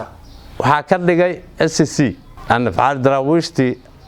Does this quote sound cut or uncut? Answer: cut